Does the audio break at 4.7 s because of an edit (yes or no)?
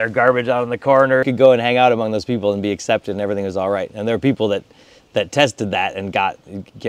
no